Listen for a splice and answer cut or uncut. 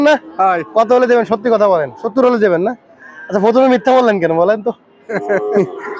cut